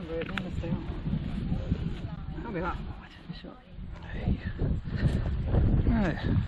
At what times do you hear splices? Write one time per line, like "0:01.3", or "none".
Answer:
0:04.1